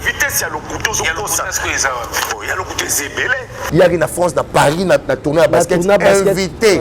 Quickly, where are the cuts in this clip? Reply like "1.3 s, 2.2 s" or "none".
3.5 s